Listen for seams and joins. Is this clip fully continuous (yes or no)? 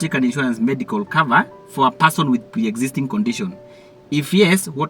yes